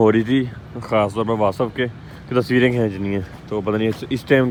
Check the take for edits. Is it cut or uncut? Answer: uncut